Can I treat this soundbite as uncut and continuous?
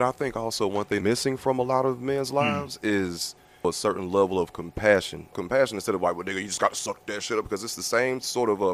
no; 3 cuts; at 1.0 s, 3.6 s, 5.4 s

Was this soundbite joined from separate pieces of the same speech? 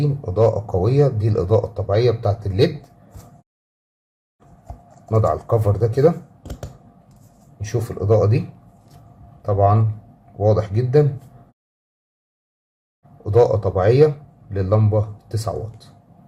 no; 0 cuts

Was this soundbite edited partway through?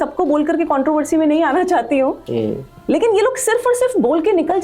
no; 0 cuts

